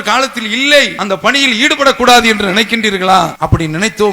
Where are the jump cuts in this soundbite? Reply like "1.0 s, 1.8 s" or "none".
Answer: 0.9 s, 3.3 s